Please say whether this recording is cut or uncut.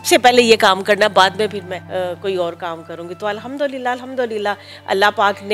cut